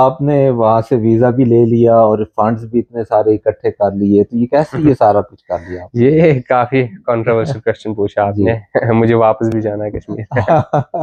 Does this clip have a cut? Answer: no; 0 cuts

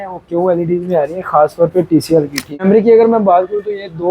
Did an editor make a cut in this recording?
yes; 1 cut; at 2.6 s

